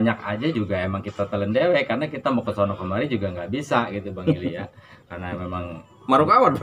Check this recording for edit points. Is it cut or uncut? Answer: uncut